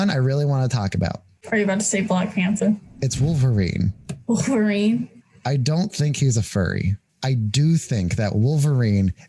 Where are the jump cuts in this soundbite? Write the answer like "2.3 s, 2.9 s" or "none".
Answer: 1.3 s, 5.1 s, 7.1 s